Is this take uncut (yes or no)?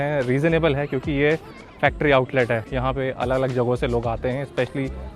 no